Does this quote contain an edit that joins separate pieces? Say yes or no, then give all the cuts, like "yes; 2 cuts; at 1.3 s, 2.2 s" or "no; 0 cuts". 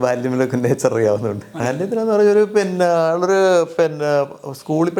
no; 0 cuts